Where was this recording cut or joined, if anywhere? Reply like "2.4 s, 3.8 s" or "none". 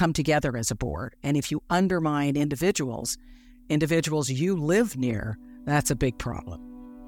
none